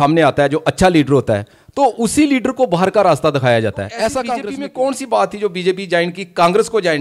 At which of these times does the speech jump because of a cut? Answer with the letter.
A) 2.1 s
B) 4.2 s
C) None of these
B